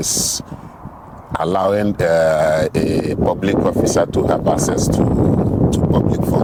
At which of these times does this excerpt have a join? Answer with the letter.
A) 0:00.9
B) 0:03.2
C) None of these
C